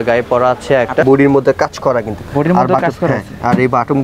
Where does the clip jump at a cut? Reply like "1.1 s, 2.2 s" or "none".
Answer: 1.0 s